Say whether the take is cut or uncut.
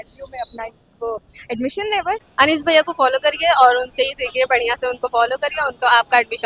cut